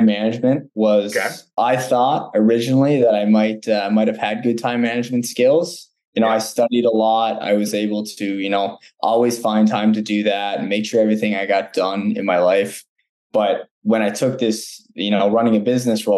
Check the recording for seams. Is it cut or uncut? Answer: cut